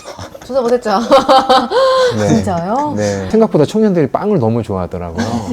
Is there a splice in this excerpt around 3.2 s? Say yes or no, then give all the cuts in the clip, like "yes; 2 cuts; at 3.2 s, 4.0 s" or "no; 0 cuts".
yes; 1 cut; at 3.2 s